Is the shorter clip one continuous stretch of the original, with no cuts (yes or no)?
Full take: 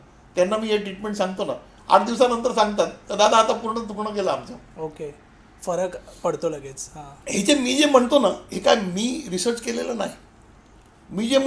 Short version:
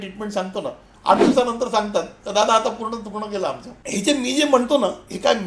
no